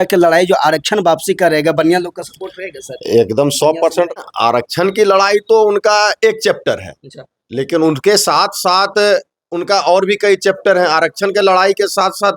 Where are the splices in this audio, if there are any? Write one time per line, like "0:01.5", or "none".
0:04.2

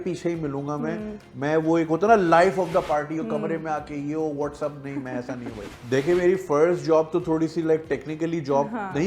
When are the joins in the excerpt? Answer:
0:05.7

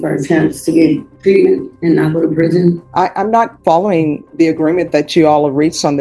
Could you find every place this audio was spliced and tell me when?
0:01.1
0:01.7
0:02.8
0:04.2

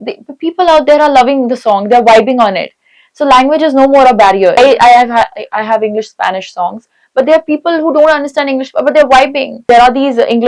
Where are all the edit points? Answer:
0:04.6
0:09.6

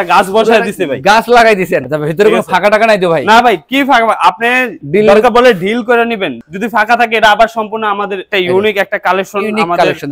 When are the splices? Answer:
0:01.8
0:04.8
0:06.4
0:08.2

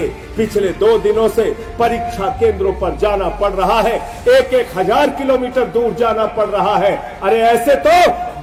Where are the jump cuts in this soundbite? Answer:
none

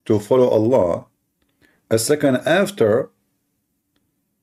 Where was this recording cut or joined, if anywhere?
none

